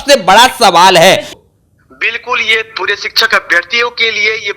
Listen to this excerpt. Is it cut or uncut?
cut